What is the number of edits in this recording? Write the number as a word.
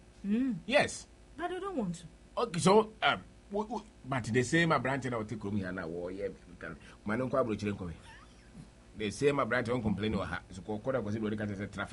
zero